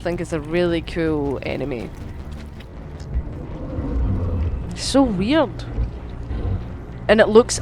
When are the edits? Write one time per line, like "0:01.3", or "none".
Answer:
0:02.6